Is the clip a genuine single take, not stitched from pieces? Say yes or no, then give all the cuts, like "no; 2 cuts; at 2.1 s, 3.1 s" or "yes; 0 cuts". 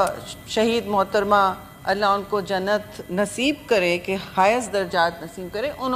yes; 0 cuts